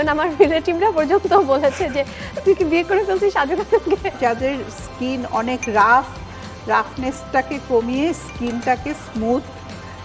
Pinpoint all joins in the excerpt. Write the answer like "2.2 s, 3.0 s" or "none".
4.2 s